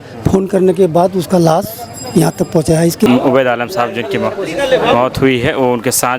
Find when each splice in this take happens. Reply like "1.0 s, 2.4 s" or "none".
3.0 s